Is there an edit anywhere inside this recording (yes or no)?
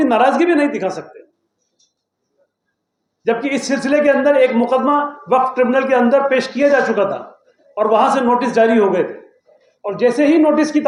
no